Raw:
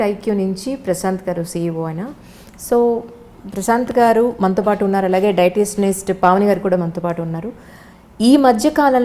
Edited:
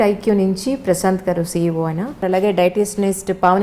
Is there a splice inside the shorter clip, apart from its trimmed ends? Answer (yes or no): yes